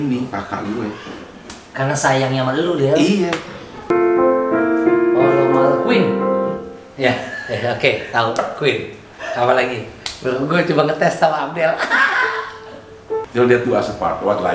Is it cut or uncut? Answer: cut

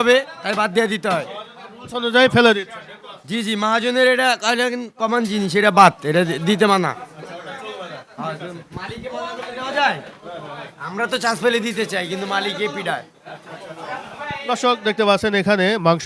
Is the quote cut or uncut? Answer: uncut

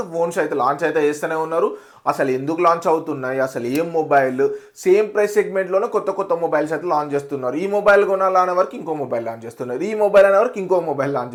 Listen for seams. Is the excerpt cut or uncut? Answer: uncut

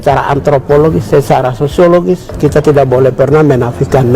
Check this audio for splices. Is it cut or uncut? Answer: uncut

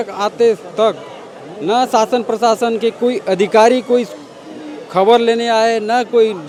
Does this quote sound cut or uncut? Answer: uncut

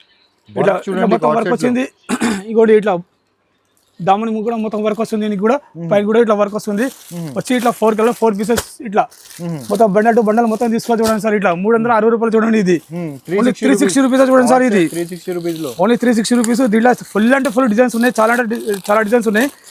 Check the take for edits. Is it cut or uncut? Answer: uncut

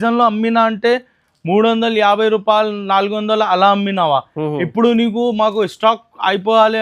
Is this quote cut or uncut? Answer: uncut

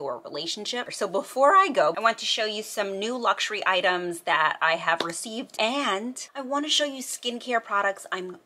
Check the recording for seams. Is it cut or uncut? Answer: cut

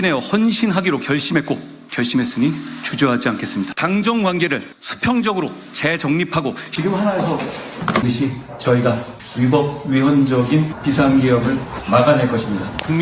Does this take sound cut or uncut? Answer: cut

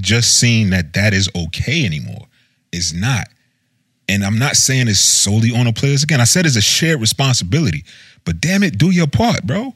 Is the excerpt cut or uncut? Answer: uncut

